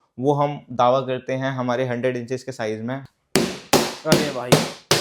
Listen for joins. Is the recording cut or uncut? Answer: cut